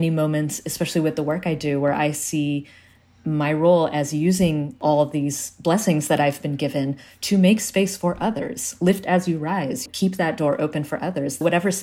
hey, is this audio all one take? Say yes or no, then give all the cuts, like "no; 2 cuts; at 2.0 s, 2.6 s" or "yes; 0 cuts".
yes; 0 cuts